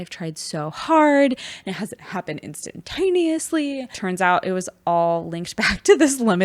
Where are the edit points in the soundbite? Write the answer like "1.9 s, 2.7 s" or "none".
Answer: 4.0 s